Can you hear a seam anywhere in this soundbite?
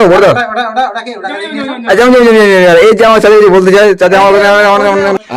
no; 0 cuts

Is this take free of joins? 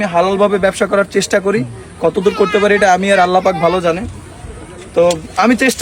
yes; 0 cuts

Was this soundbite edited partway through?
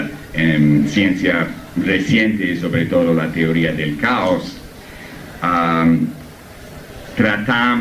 yes; 1 cut; at 6.1 s

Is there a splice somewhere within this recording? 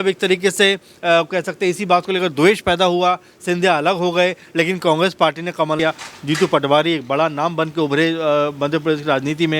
yes; 1 cut; at 5.8 s

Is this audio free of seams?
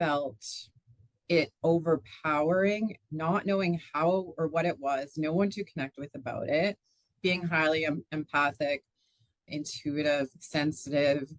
yes; 0 cuts

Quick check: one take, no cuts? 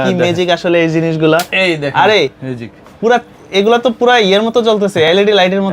yes; 0 cuts

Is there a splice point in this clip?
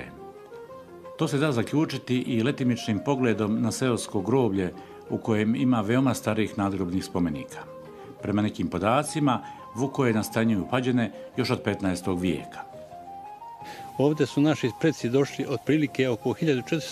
no; 0 cuts

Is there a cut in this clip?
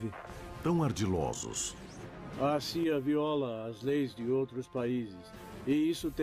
no; 0 cuts

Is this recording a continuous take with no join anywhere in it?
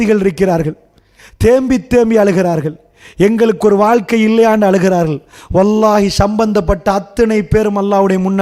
yes; 0 cuts

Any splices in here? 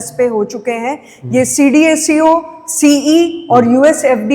no; 0 cuts

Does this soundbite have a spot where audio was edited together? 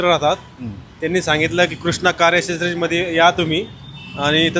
no; 0 cuts

